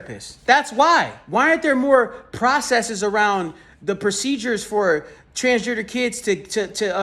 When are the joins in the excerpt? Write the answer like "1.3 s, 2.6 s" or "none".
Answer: 1.2 s